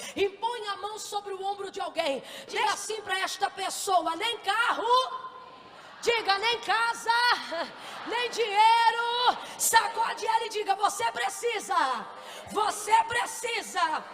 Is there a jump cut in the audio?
yes; 1 cut; at 2.7 s

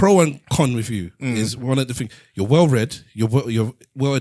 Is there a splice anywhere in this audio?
no; 0 cuts

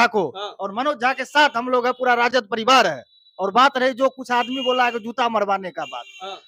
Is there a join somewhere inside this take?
no; 0 cuts

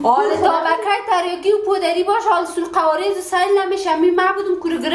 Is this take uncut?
yes; 0 cuts

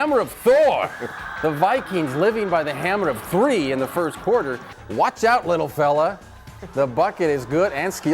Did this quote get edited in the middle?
yes; 1 cut; at 4.7 s

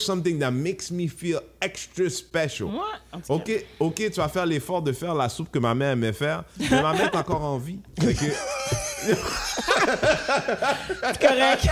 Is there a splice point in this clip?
yes; 1 cut; at 2.7 s

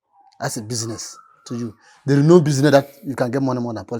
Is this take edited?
no; 0 cuts

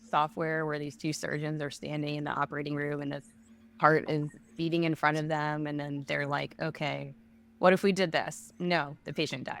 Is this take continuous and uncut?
yes; 0 cuts

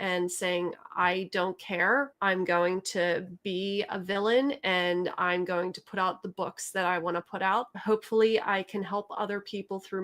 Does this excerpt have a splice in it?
yes; 2 cuts; at 2.1 s, 7.7 s

